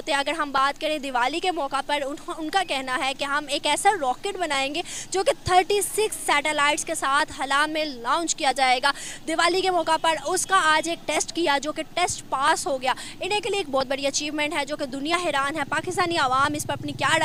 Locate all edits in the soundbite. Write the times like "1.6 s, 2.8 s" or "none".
none